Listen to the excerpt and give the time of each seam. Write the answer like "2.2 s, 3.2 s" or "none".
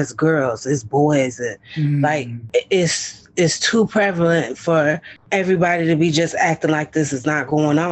2.4 s, 5.1 s